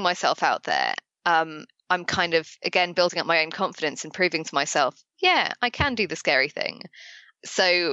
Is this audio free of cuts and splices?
yes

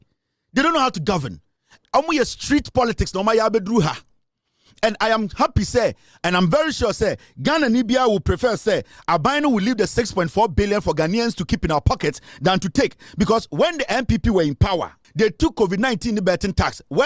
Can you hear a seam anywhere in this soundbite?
yes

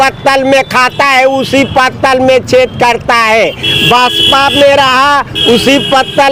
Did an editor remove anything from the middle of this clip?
no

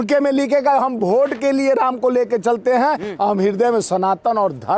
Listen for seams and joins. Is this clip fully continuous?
yes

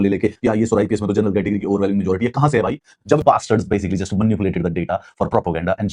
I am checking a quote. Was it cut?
yes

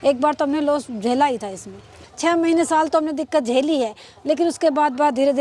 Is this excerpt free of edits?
no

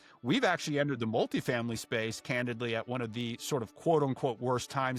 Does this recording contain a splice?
no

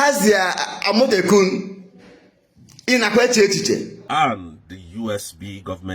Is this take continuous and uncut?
no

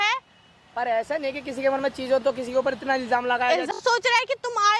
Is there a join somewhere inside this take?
yes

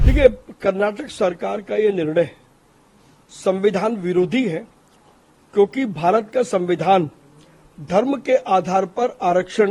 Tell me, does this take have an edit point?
no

